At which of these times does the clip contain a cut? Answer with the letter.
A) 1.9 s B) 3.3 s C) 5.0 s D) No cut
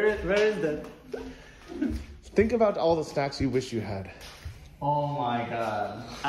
A